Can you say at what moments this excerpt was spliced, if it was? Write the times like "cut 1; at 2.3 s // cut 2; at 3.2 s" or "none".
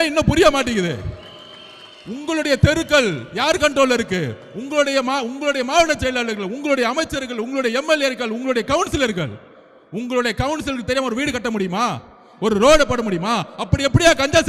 none